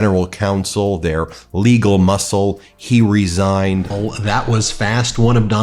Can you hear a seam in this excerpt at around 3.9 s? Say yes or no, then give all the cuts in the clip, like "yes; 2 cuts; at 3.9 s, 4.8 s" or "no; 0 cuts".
yes; 1 cut; at 3.9 s